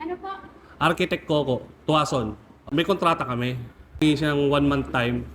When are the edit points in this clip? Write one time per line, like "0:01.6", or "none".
0:02.6
0:04.0